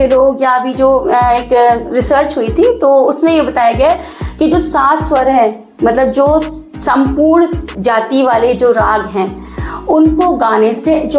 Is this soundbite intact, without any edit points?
yes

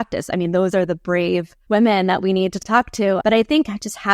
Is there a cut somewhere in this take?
yes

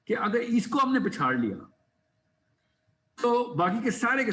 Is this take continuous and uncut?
yes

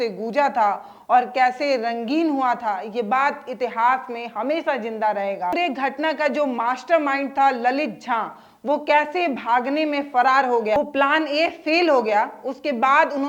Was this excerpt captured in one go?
no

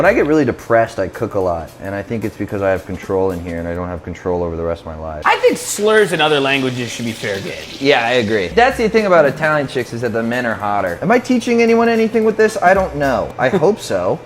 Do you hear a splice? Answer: yes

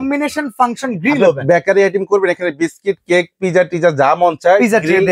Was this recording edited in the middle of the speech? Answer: no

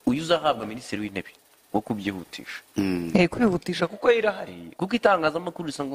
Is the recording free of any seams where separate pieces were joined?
yes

